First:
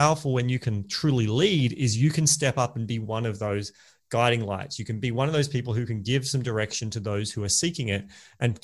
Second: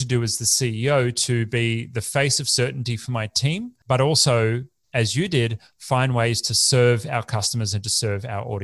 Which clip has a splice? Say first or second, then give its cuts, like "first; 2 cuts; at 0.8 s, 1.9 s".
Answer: second; 1 cut; at 3.8 s